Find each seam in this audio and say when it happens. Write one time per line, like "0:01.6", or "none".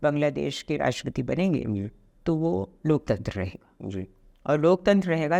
none